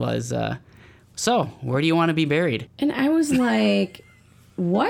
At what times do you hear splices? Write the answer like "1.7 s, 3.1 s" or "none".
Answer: 2.7 s